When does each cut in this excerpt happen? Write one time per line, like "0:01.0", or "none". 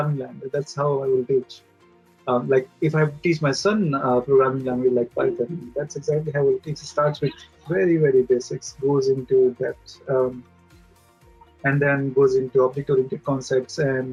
none